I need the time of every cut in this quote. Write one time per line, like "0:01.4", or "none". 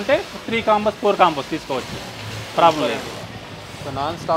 none